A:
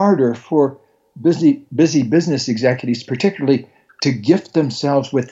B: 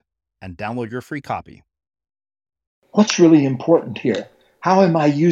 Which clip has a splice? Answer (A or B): B